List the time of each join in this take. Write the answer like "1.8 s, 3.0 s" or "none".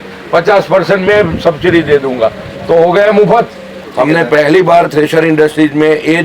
3.8 s